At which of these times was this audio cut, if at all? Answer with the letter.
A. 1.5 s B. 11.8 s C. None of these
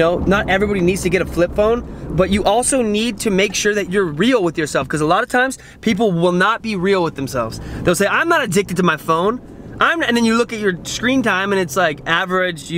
C